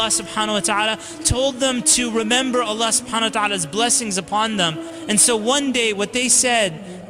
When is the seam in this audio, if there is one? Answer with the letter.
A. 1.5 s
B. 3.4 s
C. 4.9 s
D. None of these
C